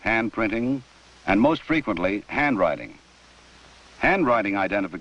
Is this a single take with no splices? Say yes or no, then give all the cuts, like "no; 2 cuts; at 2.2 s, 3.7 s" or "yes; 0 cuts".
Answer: yes; 0 cuts